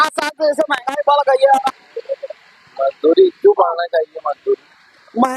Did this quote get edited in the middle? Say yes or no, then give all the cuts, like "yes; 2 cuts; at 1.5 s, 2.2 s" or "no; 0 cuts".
yes; 1 cut; at 1.7 s